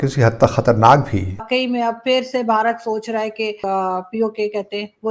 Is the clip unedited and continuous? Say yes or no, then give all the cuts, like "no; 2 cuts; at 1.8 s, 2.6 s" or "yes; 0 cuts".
no; 2 cuts; at 1.5 s, 3.6 s